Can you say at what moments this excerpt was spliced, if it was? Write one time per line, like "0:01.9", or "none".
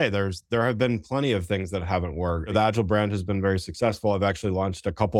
0:02.5